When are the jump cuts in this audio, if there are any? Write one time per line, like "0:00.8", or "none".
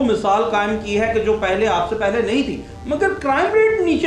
none